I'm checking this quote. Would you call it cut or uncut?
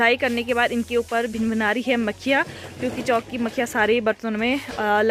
uncut